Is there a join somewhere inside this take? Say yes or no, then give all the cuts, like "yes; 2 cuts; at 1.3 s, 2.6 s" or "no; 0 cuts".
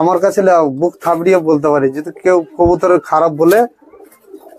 no; 0 cuts